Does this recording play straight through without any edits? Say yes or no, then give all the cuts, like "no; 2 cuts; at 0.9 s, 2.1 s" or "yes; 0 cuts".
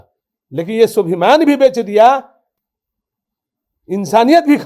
yes; 0 cuts